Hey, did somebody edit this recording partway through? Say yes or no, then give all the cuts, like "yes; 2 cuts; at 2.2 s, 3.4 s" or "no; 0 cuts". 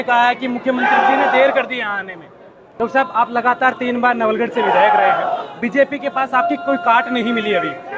yes; 1 cut; at 2.6 s